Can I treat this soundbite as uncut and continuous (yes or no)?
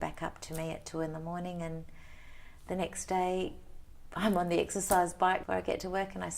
no